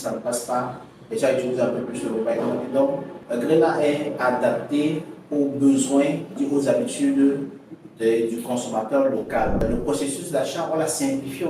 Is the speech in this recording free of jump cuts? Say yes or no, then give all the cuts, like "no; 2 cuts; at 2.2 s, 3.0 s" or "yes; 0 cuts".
no; 3 cuts; at 3.1 s, 6.4 s, 9.6 s